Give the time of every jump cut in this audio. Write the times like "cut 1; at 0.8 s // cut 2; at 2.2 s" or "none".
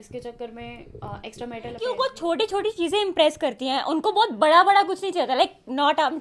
cut 1; at 1.8 s